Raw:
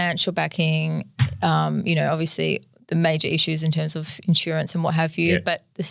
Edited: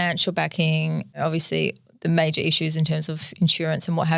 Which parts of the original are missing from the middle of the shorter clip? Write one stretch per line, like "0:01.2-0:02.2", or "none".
0:01.2-0:02.1